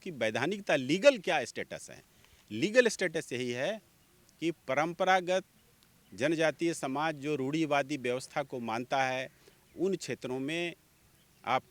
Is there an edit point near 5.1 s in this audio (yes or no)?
no